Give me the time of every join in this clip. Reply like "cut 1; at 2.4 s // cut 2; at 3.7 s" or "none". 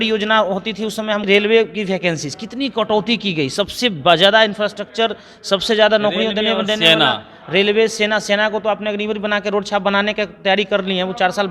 cut 1; at 1.2 s